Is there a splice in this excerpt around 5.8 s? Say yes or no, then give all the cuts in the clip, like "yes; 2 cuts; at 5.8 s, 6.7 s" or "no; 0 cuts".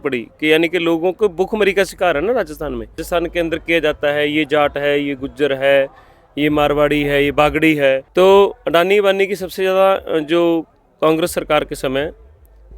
no; 2 cuts; at 3.0 s, 8.1 s